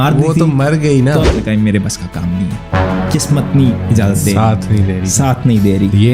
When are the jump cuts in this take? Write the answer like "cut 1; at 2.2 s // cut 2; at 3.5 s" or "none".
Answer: cut 1; at 1.3 s